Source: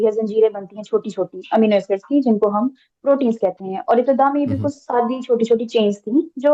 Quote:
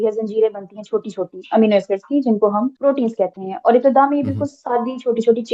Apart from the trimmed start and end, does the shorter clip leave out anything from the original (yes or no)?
yes